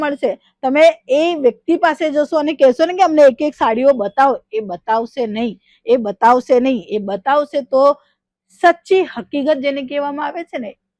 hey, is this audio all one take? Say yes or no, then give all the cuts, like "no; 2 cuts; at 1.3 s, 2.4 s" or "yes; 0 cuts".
yes; 0 cuts